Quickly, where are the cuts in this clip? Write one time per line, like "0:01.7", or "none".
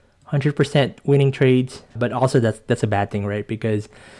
0:01.8